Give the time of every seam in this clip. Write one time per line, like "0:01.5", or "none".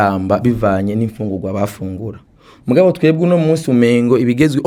none